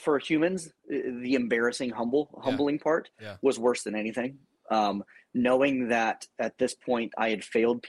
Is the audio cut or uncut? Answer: uncut